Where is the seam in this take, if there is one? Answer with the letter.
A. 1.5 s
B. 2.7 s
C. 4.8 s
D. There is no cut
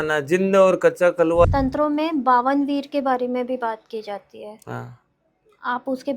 A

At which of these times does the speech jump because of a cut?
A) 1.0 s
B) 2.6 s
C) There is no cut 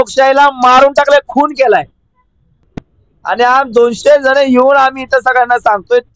B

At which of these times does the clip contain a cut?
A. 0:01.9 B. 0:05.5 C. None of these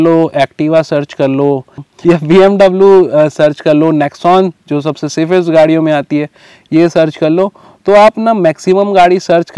A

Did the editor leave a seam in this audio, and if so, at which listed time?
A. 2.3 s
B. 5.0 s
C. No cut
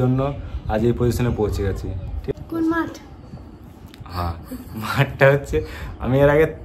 A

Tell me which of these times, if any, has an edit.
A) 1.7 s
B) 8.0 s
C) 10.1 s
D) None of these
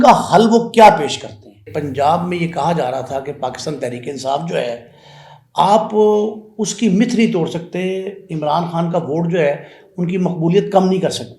A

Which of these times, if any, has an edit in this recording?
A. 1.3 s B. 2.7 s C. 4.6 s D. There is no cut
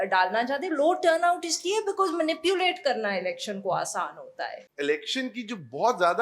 C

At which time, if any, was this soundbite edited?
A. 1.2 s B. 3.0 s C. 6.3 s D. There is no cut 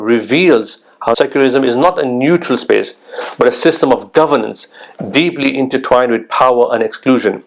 A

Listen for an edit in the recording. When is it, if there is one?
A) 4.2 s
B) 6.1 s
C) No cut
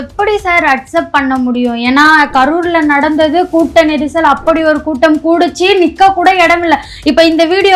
C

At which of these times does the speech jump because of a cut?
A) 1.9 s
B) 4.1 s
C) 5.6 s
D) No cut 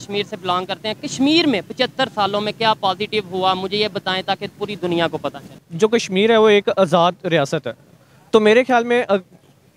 C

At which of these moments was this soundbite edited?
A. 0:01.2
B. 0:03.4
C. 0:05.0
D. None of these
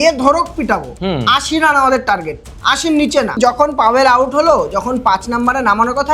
B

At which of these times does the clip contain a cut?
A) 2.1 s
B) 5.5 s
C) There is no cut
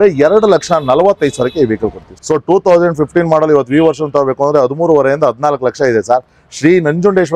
A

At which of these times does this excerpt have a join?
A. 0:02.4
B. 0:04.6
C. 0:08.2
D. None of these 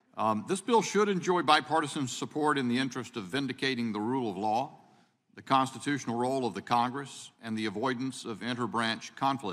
B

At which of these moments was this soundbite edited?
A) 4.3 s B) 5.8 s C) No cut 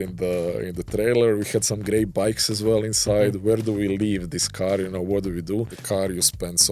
B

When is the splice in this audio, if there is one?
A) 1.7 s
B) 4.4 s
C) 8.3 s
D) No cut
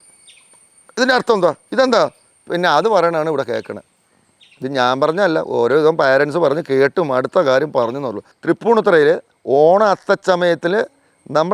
C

